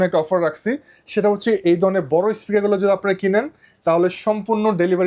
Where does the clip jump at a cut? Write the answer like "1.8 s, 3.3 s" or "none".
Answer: none